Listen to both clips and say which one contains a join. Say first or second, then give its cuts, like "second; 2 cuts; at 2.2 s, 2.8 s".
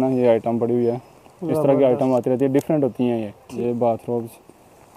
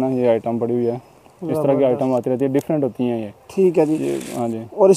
first; 1 cut; at 3.4 s